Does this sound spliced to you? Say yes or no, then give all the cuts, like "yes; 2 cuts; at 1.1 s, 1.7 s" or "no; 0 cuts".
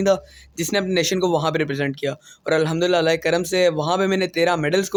no; 0 cuts